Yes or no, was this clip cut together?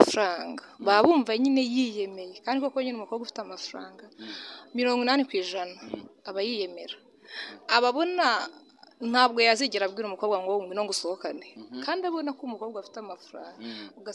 no